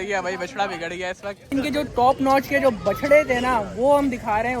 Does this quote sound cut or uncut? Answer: cut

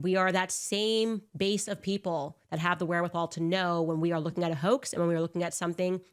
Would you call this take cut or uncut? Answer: uncut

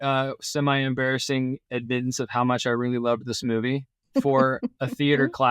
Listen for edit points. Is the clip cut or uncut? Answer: cut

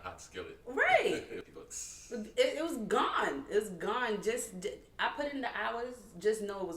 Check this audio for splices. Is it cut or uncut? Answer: cut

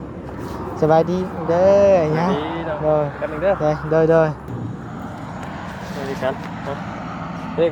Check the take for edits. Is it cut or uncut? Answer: cut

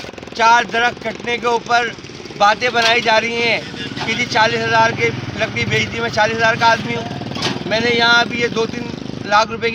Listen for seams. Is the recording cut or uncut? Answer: uncut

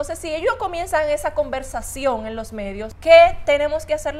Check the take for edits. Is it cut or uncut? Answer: cut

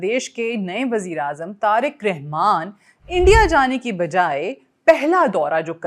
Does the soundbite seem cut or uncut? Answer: uncut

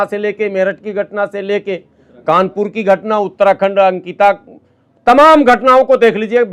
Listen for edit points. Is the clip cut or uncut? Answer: uncut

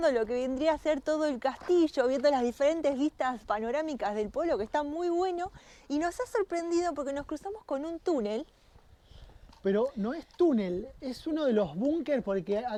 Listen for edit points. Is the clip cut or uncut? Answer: uncut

